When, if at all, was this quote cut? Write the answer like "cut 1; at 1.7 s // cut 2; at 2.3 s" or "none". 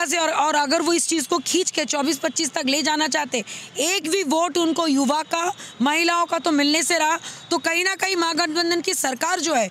none